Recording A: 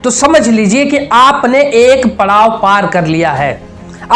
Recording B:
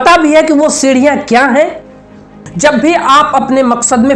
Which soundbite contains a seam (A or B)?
B